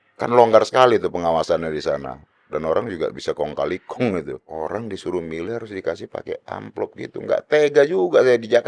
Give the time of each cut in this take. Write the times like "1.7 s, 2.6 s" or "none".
4.5 s